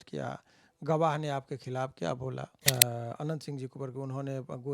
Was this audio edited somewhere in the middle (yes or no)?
yes